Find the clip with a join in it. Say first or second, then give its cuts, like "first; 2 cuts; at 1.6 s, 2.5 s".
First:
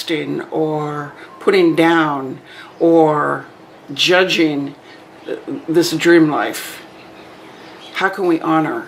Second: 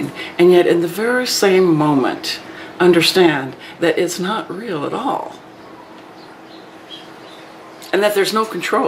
second; 1 cut; at 5.5 s